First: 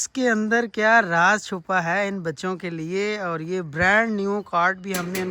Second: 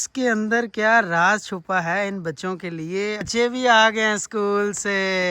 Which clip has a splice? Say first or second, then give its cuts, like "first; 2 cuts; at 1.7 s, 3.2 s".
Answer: second; 1 cut; at 3.3 s